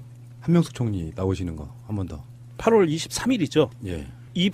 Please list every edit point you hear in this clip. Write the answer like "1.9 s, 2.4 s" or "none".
1.5 s